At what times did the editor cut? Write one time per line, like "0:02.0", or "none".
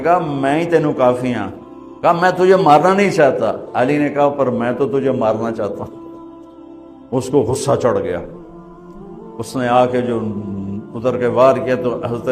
none